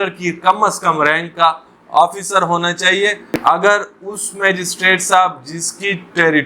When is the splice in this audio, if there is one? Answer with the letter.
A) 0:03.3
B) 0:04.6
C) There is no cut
A